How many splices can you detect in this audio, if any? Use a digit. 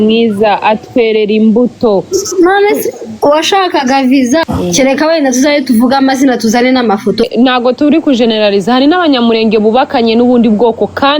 2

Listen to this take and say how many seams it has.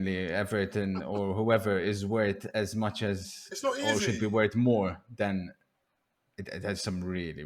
0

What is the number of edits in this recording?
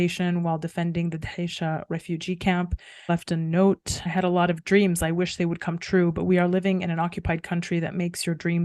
2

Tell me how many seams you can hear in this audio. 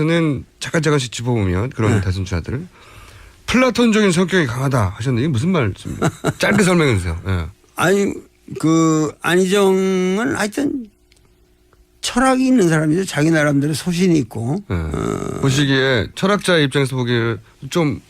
1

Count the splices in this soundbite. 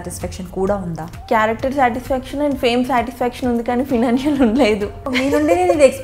2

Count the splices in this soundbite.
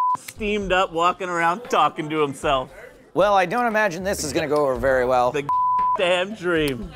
0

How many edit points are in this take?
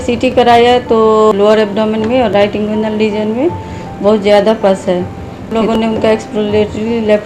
2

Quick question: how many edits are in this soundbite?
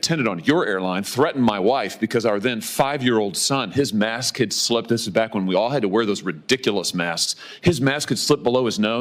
0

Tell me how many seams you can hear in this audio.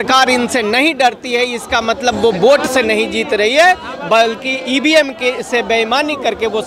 0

